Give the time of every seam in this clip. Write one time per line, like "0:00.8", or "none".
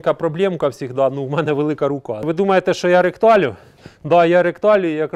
0:02.3